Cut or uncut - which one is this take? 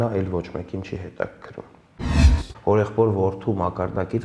cut